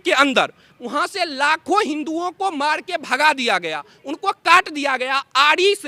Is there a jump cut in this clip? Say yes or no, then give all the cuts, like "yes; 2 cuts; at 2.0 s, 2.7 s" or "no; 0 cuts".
no; 0 cuts